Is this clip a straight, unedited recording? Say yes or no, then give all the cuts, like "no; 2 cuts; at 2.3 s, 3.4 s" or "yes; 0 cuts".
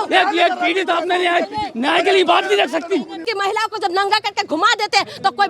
no; 1 cut; at 3.2 s